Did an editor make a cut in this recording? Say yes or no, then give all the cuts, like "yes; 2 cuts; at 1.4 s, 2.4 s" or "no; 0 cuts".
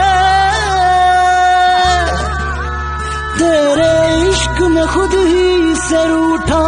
no; 0 cuts